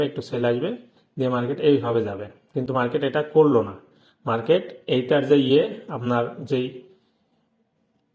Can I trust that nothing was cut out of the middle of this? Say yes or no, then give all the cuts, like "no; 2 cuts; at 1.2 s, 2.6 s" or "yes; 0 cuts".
yes; 0 cuts